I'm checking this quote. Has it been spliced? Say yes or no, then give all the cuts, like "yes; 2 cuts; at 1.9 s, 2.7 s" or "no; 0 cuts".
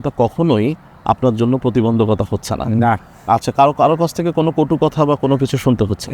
no; 0 cuts